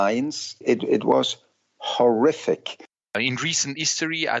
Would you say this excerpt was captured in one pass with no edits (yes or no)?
no